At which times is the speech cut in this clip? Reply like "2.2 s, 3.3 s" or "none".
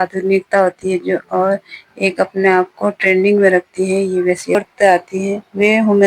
4.6 s